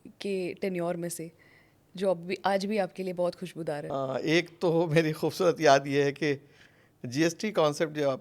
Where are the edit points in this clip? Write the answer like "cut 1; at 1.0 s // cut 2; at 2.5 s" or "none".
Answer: none